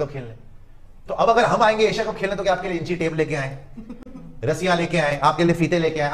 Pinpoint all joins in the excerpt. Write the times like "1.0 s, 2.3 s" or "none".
none